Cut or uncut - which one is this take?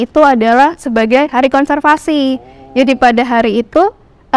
uncut